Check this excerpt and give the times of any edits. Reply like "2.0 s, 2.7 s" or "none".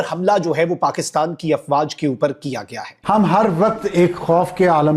2.9 s